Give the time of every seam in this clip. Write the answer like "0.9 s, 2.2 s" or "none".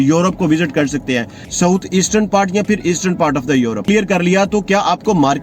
1.4 s, 3.8 s